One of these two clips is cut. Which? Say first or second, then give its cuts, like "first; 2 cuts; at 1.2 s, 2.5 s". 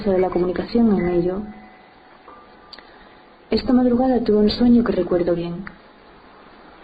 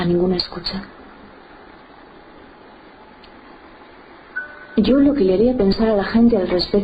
second; 1 cut; at 1.0 s